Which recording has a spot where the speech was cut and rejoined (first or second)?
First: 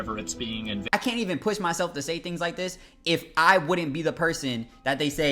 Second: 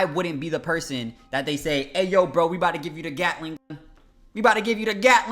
first